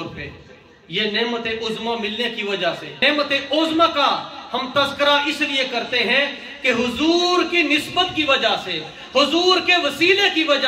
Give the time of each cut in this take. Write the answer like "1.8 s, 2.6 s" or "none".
3.0 s